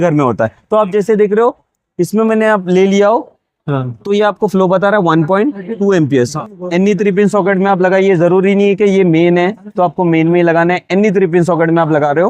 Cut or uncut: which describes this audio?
cut